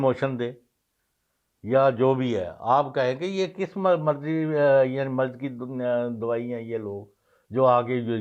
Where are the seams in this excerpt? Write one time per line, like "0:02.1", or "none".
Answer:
none